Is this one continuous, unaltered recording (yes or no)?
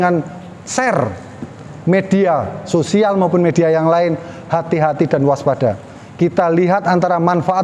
yes